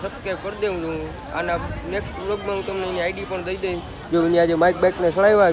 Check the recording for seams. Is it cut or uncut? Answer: uncut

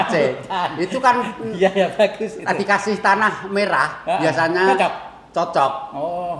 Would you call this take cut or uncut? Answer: uncut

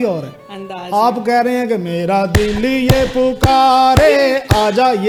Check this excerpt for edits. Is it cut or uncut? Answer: uncut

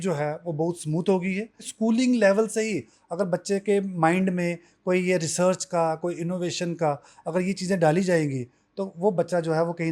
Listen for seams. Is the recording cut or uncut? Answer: cut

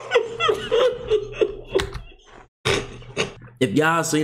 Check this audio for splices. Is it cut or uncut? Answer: cut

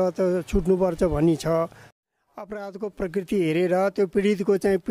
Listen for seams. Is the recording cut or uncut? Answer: cut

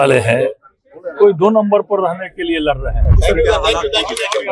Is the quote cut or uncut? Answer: cut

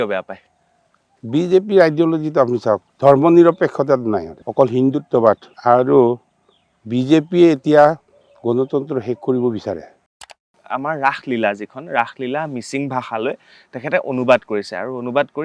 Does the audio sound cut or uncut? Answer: cut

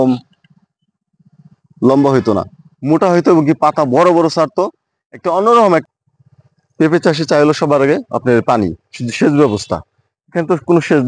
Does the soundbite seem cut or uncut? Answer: cut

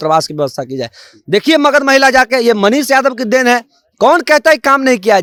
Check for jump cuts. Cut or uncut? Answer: uncut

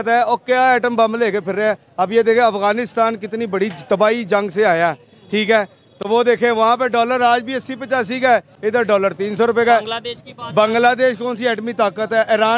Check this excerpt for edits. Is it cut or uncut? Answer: uncut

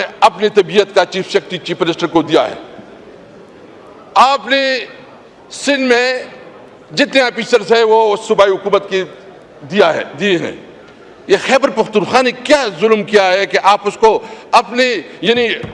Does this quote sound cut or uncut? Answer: uncut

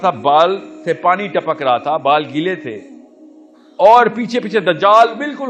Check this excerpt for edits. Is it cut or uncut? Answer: uncut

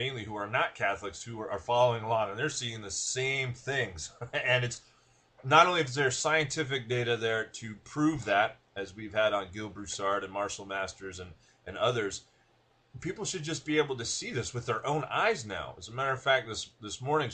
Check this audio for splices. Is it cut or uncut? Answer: cut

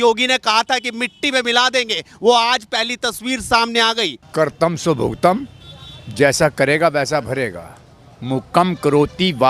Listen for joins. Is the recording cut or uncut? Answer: cut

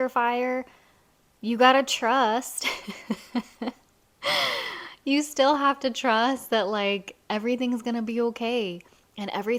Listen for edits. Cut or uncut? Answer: uncut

